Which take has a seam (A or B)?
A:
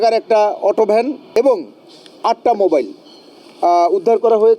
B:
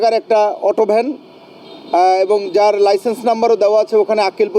A